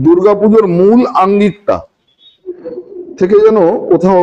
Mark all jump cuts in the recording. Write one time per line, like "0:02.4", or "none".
none

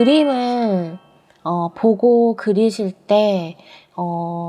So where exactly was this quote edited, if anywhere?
none

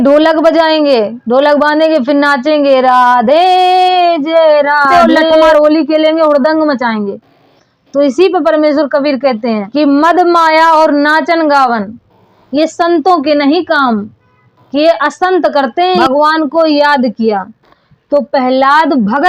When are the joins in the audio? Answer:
0:05.5
0:09.7
0:16.0

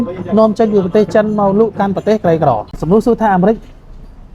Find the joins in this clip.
0:02.7

